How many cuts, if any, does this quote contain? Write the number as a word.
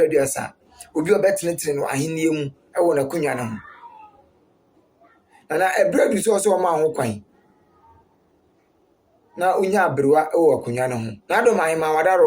one